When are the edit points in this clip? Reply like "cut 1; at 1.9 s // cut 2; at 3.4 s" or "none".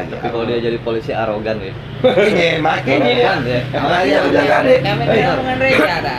none